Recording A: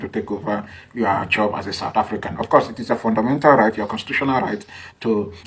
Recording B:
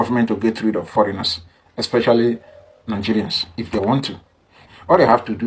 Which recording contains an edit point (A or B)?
B